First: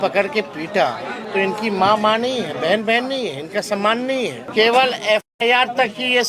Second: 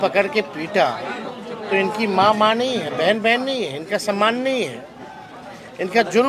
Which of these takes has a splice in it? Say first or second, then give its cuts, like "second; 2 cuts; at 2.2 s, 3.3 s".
first; 2 cuts; at 1.1 s, 4.4 s